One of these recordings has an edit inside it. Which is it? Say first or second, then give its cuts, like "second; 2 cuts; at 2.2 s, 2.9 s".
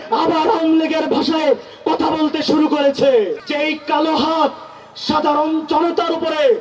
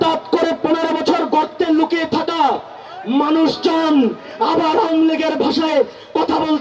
first; 1 cut; at 3.4 s